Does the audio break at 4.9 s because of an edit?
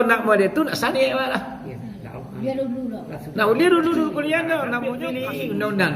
yes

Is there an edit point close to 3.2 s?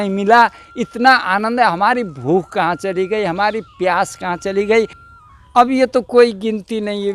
no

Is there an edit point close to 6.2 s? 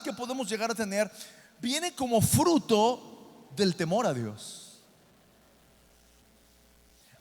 yes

